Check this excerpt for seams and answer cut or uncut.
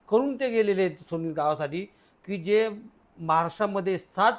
uncut